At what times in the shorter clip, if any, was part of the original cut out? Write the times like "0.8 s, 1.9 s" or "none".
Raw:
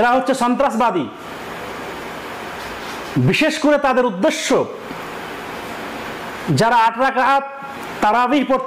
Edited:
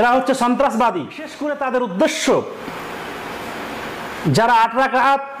1.4 s

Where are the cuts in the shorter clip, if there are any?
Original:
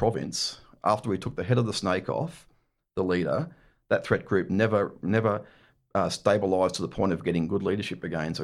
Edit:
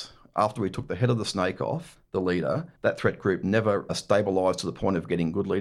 1.9 s, 2.7 s, 3.9 s

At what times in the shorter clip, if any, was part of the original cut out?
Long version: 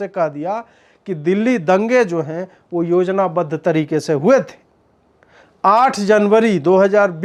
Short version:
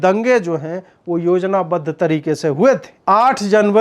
2.9 s

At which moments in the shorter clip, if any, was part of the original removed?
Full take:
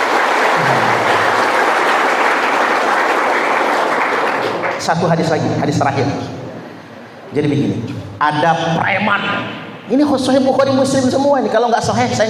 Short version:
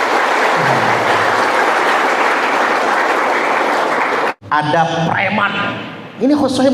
4.3 s

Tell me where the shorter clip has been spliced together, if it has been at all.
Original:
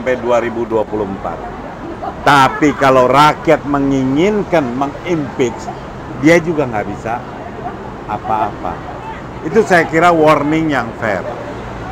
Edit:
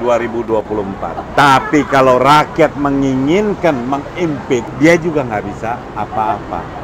1.2 s, 4.7 s, 5.9 s

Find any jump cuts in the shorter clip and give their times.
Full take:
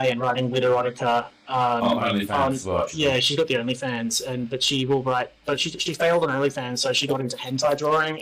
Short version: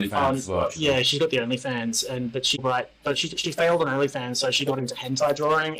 2.6 s

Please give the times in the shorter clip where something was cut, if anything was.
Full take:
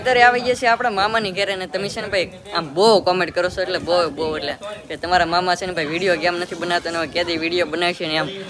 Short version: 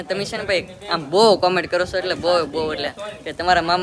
none

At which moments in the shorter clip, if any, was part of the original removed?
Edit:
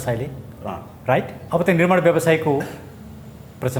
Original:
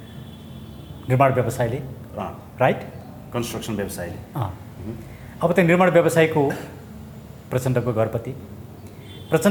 1.4 s

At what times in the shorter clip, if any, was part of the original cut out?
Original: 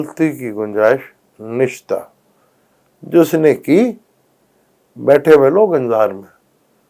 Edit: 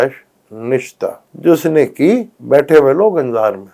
1.3 s, 2.3 s

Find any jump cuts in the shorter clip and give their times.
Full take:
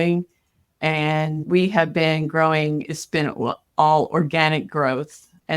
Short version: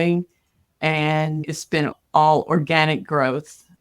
1.4 s

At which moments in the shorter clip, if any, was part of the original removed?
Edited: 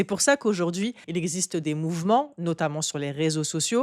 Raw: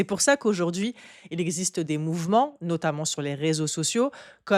1.0 s

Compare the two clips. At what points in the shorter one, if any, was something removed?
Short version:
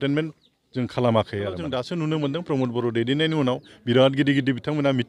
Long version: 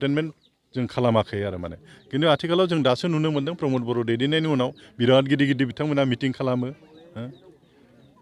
1.6 s

